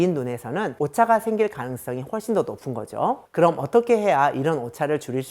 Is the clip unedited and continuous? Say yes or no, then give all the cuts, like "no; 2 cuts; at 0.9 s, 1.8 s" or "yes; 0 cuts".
no; 2 cuts; at 0.8 s, 3.2 s